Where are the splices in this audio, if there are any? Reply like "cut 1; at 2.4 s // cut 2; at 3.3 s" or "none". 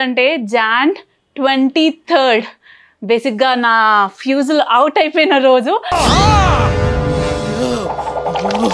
none